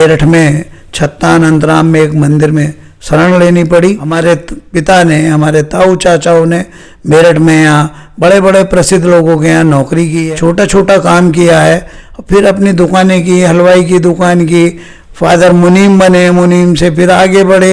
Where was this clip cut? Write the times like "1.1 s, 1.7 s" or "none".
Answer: 4.1 s, 10.2 s